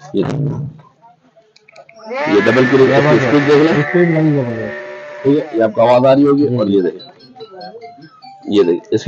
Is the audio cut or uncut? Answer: uncut